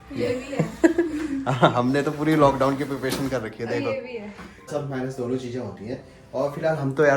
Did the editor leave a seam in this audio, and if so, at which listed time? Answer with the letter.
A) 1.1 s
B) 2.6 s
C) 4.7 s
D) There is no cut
C